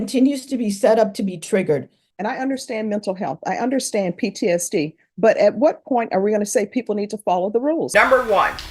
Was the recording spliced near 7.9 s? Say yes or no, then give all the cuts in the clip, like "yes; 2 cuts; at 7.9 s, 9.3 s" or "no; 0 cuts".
yes; 2 cuts; at 2.0 s, 7.9 s